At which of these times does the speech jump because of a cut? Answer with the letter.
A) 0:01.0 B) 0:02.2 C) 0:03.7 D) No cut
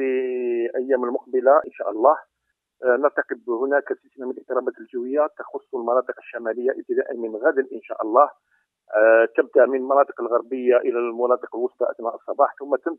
B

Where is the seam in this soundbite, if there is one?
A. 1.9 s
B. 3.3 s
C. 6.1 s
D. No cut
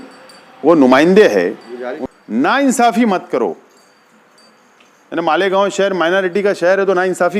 A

